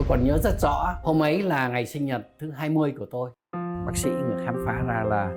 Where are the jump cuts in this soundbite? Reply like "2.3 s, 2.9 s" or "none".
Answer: none